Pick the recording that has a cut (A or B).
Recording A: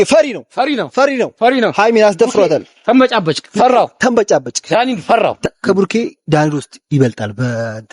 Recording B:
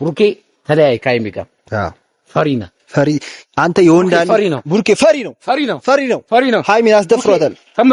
A